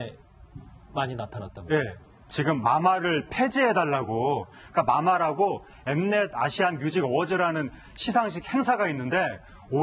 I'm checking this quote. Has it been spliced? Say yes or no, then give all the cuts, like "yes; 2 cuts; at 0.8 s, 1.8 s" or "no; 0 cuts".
yes; 1 cut; at 2.0 s